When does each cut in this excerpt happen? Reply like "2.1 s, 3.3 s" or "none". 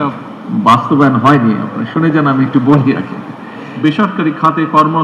3.7 s